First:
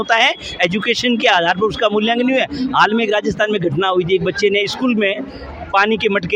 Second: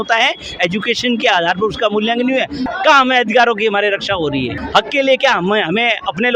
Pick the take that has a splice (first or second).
second